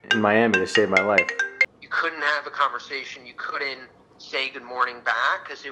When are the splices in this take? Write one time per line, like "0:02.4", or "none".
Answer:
0:01.3